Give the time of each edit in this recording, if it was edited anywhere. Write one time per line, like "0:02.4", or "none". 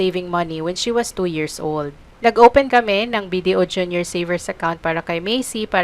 0:02.0
0:02.7